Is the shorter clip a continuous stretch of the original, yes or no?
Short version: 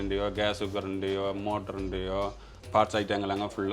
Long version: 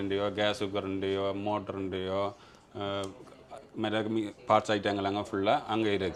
no